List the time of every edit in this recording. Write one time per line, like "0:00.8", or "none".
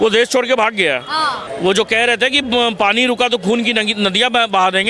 0:01.4